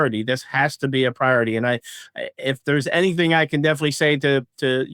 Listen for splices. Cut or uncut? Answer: uncut